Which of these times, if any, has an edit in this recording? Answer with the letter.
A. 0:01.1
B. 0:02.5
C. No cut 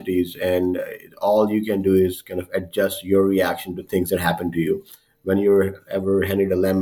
C